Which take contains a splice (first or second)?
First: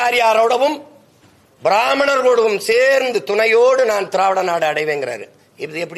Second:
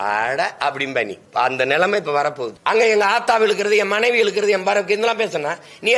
second